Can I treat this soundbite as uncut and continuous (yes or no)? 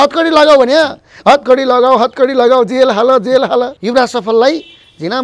no